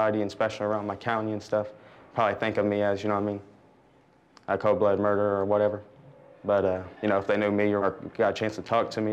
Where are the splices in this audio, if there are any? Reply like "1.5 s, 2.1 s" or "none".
6.9 s, 7.8 s